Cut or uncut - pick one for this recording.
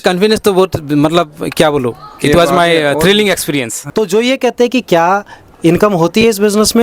cut